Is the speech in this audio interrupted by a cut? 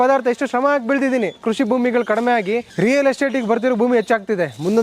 yes; 2 cuts; at 1.4 s, 2.7 s

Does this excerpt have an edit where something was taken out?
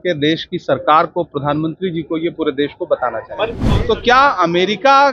yes; 1 cut; at 3.6 s

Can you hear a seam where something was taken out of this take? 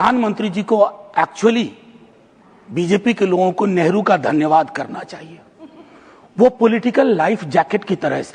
no; 0 cuts

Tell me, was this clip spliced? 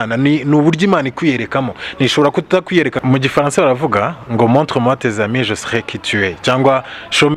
yes; 1 cut; at 3.0 s

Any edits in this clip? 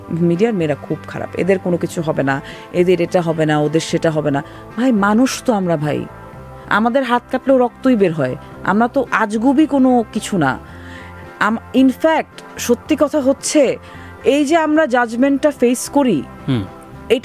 no; 0 cuts

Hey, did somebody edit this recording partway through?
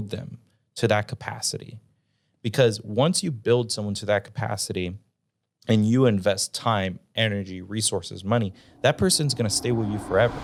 no; 0 cuts

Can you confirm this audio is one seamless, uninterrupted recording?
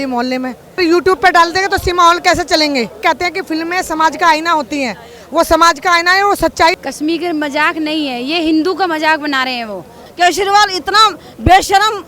no; 4 cuts; at 0.8 s, 3.0 s, 6.8 s, 10.0 s

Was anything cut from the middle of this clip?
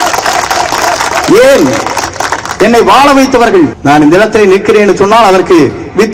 yes; 1 cut; at 3.8 s

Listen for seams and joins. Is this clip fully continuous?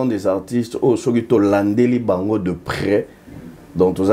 yes; 0 cuts

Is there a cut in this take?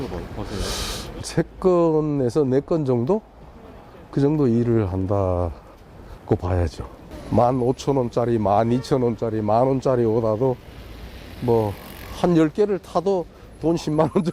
no; 0 cuts

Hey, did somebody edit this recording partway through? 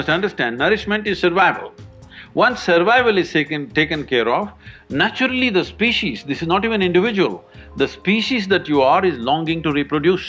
no; 0 cuts

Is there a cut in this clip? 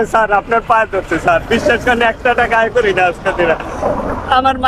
no; 0 cuts

